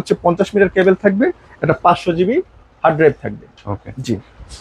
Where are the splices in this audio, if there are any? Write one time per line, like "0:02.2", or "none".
none